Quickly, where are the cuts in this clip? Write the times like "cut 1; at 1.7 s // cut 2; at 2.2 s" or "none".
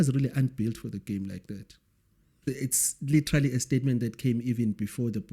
cut 1; at 2.5 s